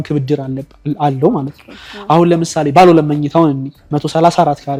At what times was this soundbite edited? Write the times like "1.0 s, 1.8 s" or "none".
none